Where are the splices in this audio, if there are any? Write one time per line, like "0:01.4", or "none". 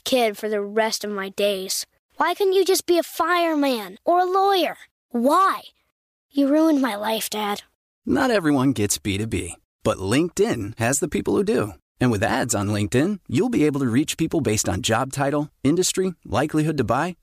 none